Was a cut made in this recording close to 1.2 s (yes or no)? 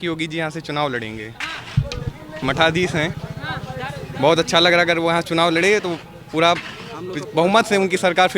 no